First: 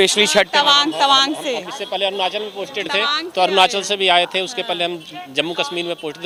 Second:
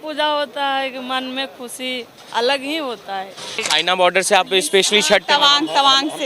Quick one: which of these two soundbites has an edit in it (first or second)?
second